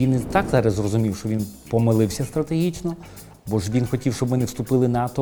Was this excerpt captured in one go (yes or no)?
yes